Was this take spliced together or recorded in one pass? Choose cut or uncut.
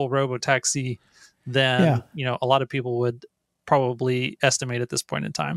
uncut